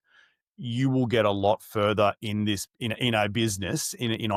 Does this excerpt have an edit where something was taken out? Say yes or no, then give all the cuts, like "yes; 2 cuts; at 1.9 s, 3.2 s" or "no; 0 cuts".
no; 0 cuts